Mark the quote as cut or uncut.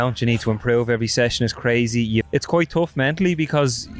cut